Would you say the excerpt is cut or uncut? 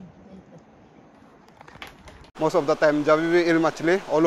cut